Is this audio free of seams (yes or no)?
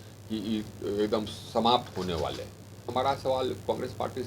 no